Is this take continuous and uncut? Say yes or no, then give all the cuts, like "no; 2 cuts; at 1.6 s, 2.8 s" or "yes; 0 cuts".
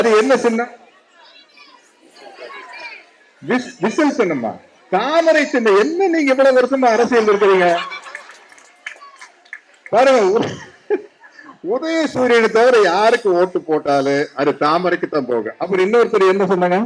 yes; 0 cuts